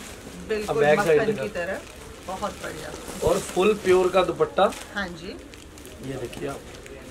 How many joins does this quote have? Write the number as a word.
zero